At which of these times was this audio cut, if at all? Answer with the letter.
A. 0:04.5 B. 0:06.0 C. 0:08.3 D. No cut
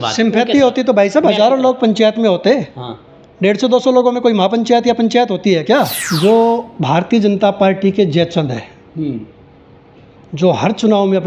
B